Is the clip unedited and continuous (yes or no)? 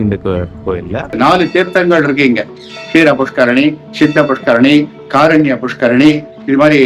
no